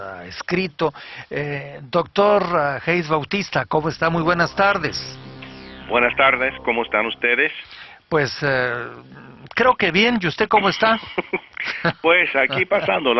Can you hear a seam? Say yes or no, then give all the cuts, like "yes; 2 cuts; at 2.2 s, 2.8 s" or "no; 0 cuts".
yes; 1 cut; at 8.8 s